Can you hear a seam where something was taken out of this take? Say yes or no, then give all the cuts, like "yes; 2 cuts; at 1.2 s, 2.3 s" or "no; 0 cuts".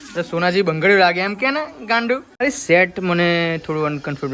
yes; 1 cut; at 2.3 s